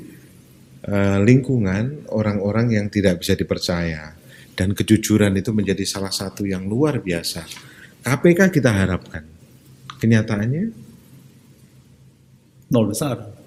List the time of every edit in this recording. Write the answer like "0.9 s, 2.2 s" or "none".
none